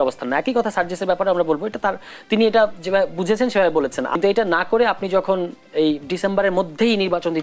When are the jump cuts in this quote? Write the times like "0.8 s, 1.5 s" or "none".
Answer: 4.1 s